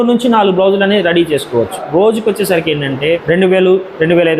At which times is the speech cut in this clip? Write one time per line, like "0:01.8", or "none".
0:01.8
0:03.0